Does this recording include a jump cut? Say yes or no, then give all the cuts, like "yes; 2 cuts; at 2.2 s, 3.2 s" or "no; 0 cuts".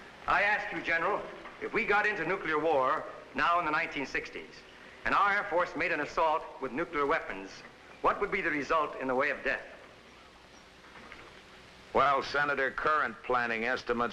yes; 1 cut; at 7.3 s